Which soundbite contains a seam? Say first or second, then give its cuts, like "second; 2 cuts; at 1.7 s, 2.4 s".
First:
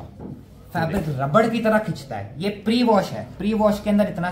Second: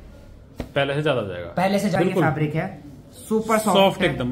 second; 1 cut; at 1.9 s